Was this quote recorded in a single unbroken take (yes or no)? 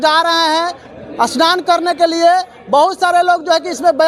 yes